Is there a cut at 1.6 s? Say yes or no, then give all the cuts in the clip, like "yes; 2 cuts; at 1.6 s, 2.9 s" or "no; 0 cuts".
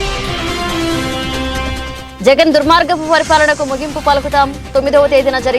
yes; 1 cut; at 1.6 s